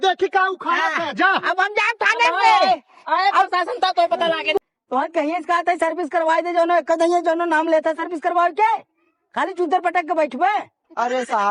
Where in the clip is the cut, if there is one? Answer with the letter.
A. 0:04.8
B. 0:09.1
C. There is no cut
A